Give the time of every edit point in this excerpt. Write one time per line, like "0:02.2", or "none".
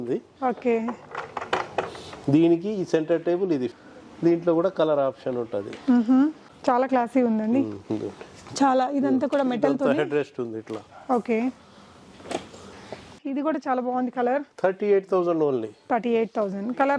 0:03.7
0:06.5
0:13.2

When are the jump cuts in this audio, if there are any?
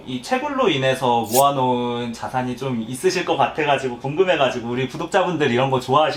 none

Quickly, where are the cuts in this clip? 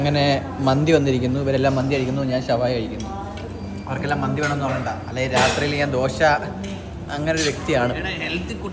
none

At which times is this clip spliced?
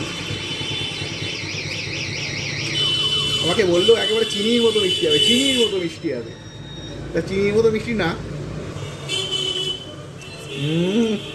0:08.7

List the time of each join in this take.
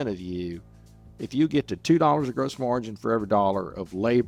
none

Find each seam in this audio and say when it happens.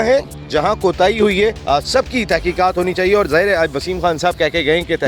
0:01.6

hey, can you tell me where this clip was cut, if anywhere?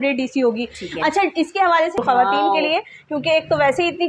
0:02.0

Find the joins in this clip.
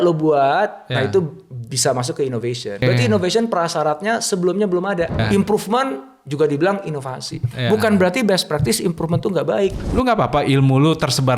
0:02.8
0:05.2
0:09.8

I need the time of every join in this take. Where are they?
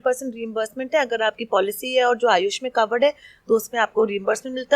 none

